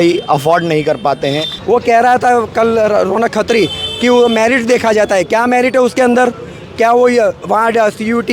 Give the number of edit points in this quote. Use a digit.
1